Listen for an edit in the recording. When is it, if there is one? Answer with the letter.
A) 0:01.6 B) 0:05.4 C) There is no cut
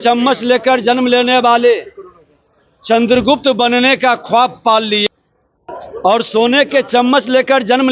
C